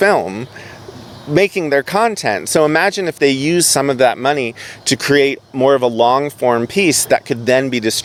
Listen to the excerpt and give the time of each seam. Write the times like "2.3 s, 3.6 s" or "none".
none